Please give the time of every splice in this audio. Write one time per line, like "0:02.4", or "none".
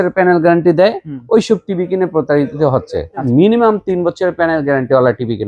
0:03.2